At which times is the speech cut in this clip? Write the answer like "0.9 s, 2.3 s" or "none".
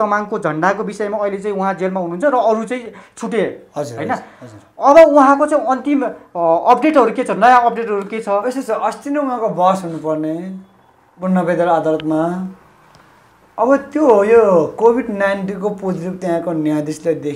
none